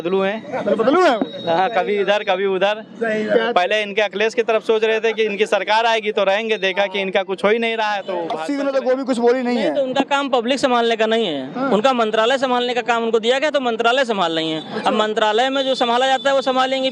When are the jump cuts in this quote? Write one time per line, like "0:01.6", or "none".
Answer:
0:08.3